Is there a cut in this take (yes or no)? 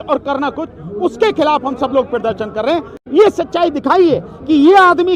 no